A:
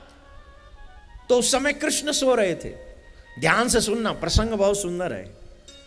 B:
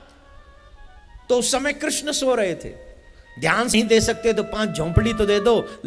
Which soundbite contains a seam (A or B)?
B